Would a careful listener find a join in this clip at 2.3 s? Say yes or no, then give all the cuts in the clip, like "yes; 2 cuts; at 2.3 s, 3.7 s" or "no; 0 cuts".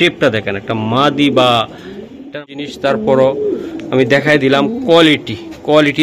yes; 1 cut; at 2.3 s